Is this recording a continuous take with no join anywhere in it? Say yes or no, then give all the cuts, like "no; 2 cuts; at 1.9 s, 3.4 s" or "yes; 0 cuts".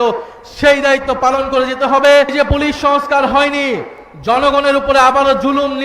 no; 1 cut; at 2.3 s